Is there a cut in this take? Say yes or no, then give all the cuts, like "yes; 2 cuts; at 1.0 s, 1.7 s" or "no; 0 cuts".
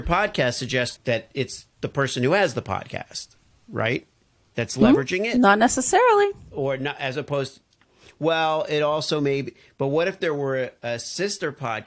yes; 1 cut; at 0.9 s